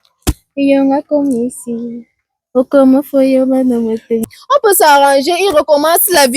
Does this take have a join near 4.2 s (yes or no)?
yes